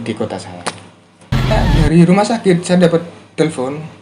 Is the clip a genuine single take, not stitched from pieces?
no; 1 cut; at 1.5 s

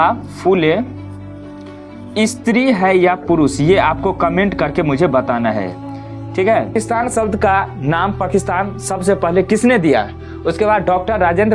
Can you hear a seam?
yes; 1 cut; at 6.7 s

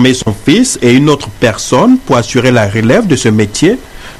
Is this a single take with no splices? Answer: no; 1 cut; at 3.1 s

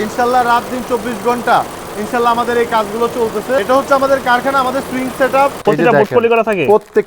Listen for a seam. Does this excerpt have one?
yes; 2 cuts; at 3.6 s, 5.6 s

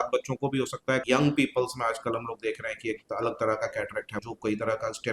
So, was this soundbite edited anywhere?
yes; 2 cuts; at 1.0 s, 4.2 s

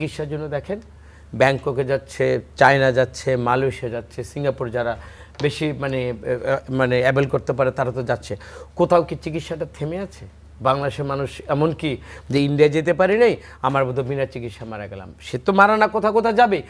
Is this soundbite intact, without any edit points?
yes; 0 cuts

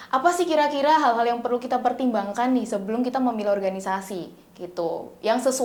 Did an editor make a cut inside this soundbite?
no; 0 cuts

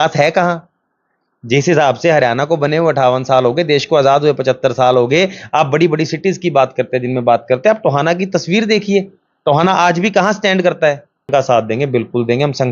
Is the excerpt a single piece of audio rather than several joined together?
no; 1 cut; at 11.3 s

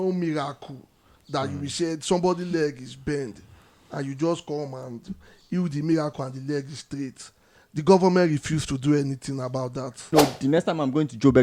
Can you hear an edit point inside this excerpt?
yes; 1 cut; at 10.1 s

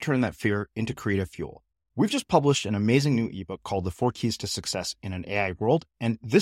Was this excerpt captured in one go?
yes; 0 cuts

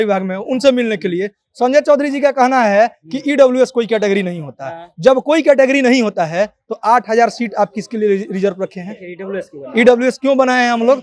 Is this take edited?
no; 0 cuts

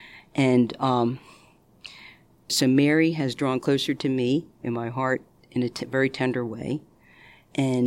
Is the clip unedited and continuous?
no; 2 cuts; at 2.5 s, 5.4 s

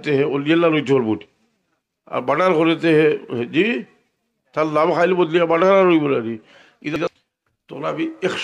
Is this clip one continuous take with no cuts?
no; 1 cut; at 7.0 s

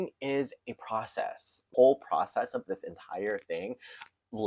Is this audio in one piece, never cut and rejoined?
no; 1 cut; at 1.5 s

